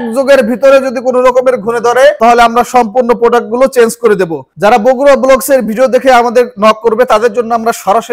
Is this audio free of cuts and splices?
no; 1 cut; at 4.4 s

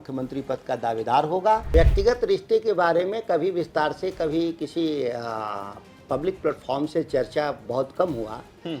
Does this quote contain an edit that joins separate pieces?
yes; 1 cut; at 1.7 s

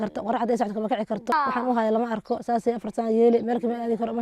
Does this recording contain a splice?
yes; 1 cut; at 1.3 s

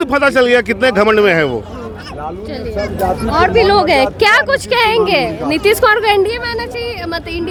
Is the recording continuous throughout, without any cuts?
yes; 0 cuts

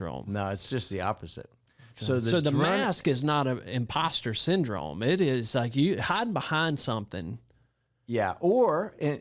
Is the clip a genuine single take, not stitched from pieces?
yes; 0 cuts

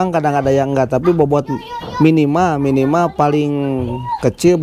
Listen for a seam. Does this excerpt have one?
no; 0 cuts

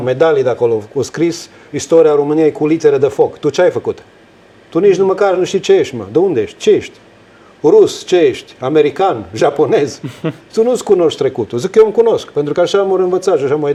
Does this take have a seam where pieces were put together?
no; 0 cuts

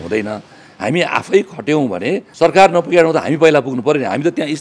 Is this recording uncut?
no; 1 cut; at 2.3 s

